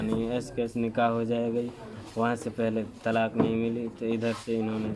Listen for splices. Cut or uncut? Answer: uncut